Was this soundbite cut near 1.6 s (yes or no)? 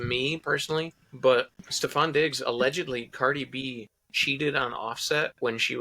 yes